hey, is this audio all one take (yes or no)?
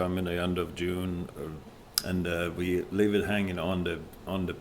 no